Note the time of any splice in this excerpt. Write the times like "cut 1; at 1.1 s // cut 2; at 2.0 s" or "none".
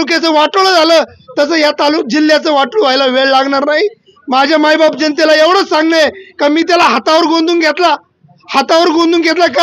none